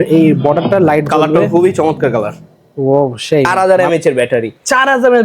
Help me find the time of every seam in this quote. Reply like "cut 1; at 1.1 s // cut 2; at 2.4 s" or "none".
cut 1; at 3.5 s

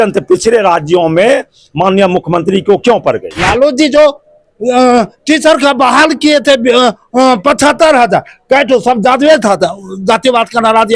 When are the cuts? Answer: cut 1; at 3.5 s

